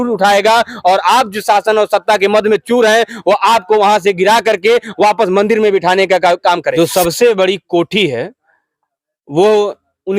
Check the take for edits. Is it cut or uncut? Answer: cut